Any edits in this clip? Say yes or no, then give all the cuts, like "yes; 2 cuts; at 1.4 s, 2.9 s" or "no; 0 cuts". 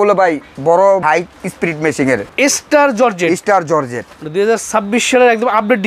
yes; 2 cuts; at 1.0 s, 2.3 s